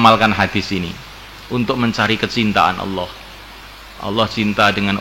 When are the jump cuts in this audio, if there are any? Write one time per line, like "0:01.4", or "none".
none